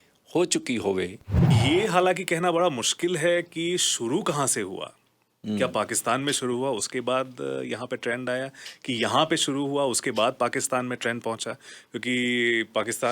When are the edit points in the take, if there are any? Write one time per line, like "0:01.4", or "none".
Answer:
0:01.5